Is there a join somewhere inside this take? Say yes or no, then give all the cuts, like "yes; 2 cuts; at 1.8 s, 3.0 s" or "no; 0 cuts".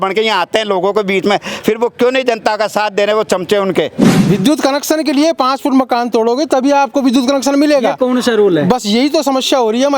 yes; 1 cut; at 4.1 s